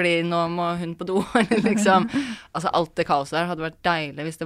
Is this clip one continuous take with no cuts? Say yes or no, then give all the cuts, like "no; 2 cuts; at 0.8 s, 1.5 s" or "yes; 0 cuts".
yes; 0 cuts